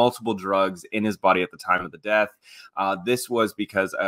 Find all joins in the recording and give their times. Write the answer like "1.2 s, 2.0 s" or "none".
none